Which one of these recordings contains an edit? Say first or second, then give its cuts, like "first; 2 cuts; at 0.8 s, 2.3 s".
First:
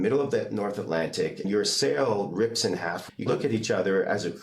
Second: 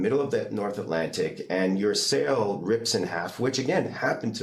first; 2 cuts; at 1.5 s, 3.2 s